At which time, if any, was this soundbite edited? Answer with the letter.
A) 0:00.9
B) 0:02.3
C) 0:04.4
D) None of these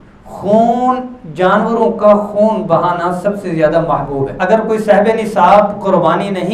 C